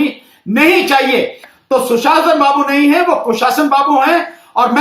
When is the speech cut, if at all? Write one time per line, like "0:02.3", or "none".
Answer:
0:01.5

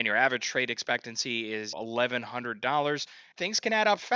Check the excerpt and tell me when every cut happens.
0:01.7
0:03.2

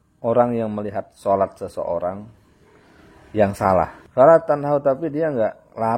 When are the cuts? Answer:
0:04.0

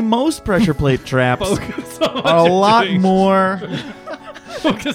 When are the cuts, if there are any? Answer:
none

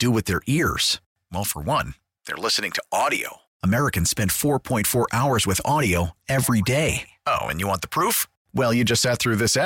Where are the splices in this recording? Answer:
none

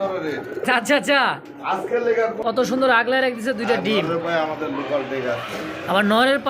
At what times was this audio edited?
0:02.3

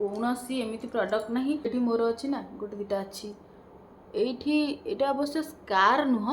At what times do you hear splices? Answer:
0:01.7

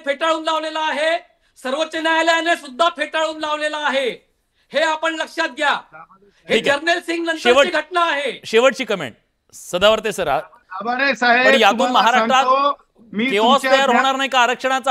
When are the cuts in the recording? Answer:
0:13.5

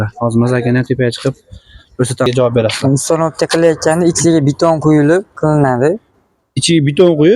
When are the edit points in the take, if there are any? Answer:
0:02.3

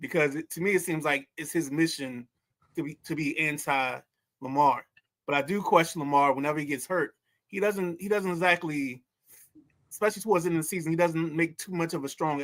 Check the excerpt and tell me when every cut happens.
none

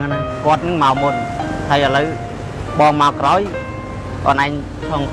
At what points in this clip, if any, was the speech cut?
none

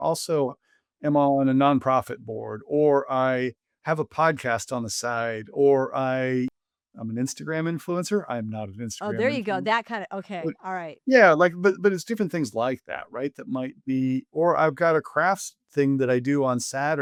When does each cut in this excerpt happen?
none

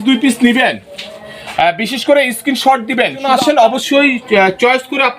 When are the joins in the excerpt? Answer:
0:03.2

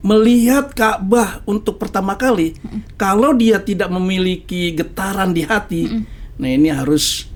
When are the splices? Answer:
none

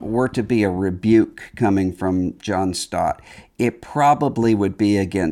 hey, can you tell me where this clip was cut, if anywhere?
none

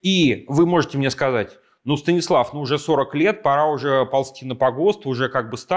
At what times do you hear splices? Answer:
none

